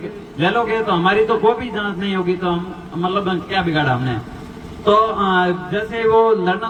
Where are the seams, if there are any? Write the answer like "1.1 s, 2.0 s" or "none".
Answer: none

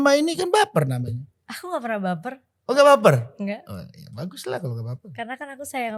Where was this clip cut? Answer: 5.0 s

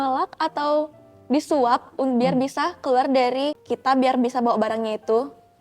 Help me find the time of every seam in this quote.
3.6 s

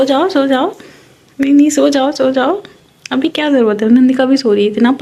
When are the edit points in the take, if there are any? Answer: none

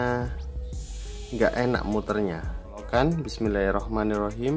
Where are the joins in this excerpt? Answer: 2.9 s

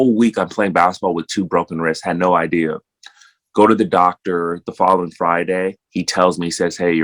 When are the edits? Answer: none

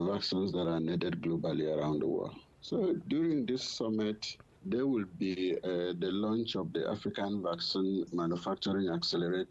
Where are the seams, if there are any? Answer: 3.0 s, 4.5 s, 8.1 s

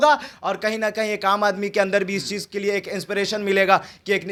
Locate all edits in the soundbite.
none

